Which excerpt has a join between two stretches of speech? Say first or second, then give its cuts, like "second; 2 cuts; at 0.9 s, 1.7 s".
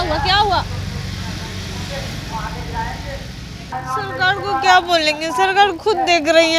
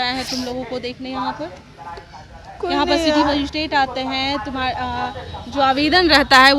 first; 1 cut; at 3.7 s